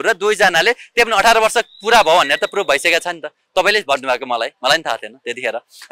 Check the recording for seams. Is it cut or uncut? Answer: uncut